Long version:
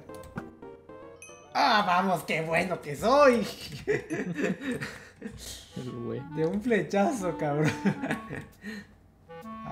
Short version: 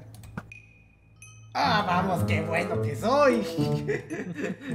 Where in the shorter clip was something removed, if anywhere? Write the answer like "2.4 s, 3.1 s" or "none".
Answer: none